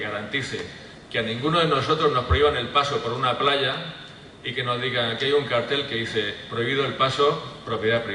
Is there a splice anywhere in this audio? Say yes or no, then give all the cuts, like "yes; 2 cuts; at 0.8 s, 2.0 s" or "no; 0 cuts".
yes; 1 cut; at 3.5 s